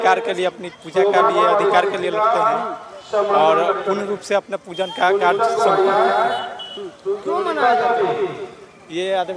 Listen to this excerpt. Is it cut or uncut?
uncut